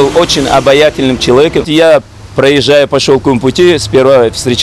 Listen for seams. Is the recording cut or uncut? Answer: uncut